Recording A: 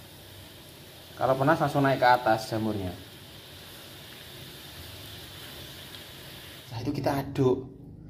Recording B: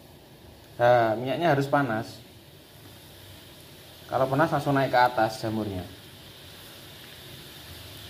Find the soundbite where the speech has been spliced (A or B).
A